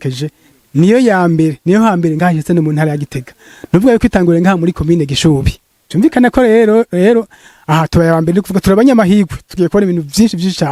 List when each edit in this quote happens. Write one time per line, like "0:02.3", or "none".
none